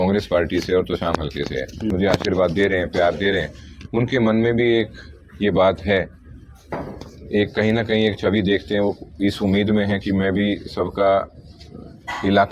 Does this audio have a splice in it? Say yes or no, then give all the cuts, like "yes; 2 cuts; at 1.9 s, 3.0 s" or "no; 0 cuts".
yes; 1 cut; at 1.9 s